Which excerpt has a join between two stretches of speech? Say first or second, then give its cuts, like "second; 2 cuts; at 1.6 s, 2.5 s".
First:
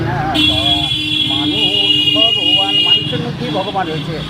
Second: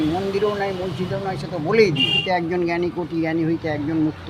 second; 1 cut; at 2.2 s